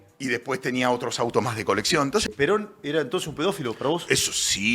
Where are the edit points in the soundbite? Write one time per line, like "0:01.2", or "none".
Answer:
0:02.3